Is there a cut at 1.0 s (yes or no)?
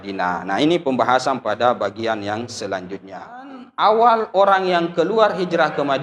no